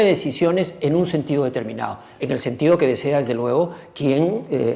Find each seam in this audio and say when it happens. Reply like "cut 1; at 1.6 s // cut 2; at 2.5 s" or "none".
none